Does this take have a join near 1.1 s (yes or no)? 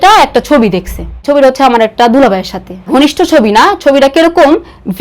yes